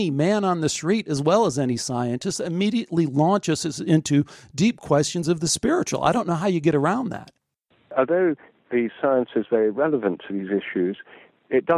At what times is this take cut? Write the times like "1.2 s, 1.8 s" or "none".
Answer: 7.4 s